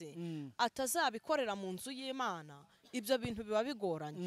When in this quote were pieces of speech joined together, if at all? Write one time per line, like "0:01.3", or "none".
none